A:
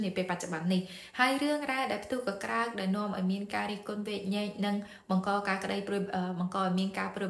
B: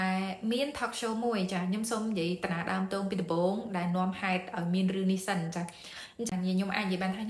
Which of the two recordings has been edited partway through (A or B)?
B